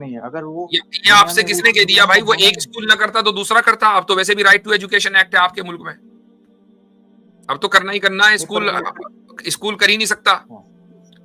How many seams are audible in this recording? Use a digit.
0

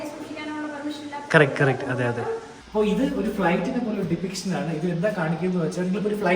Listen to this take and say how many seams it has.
1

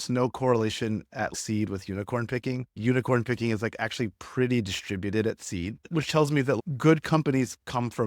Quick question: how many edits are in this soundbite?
2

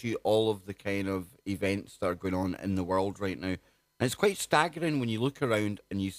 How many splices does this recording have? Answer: 1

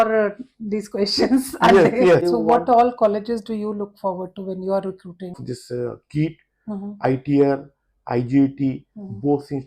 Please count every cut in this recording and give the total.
2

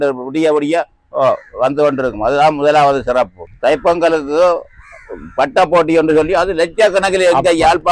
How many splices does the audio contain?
1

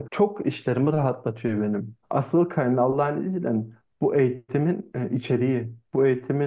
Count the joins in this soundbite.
1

